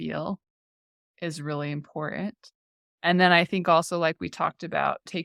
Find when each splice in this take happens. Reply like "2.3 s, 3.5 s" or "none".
none